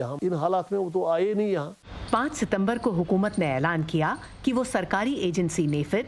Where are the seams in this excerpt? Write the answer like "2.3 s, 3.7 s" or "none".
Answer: none